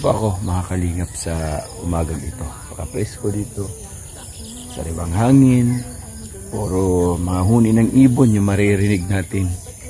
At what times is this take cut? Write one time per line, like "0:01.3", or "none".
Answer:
none